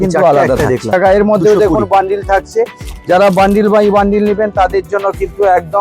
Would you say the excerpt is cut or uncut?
cut